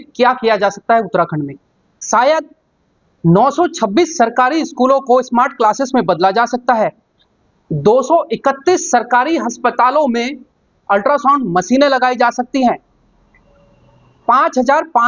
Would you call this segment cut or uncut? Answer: uncut